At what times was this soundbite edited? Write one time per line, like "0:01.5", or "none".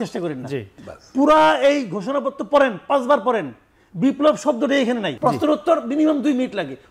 0:05.1